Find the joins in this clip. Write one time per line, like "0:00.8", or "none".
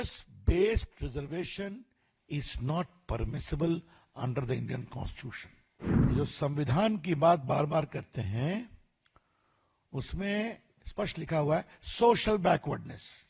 0:06.1